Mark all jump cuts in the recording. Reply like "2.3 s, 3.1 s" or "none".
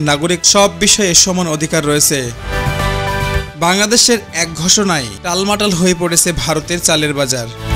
none

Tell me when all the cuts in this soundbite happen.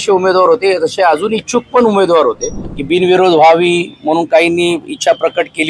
2.8 s

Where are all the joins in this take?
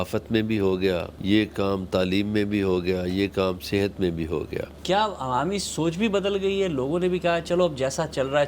1.1 s, 4.7 s

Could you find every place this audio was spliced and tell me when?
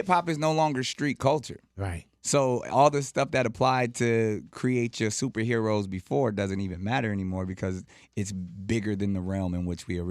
none

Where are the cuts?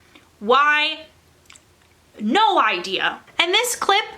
3.3 s

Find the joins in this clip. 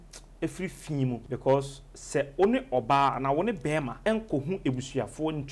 1.2 s, 3.9 s

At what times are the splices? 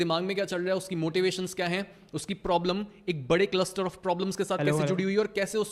none

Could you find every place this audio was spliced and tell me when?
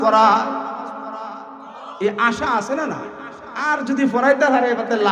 3.7 s

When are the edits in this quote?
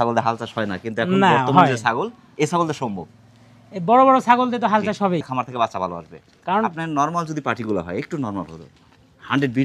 5.3 s

